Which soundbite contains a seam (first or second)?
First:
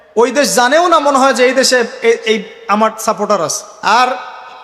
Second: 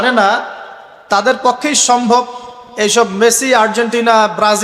first